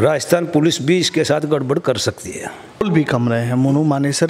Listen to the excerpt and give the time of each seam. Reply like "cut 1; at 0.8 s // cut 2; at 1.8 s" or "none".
cut 1; at 2.8 s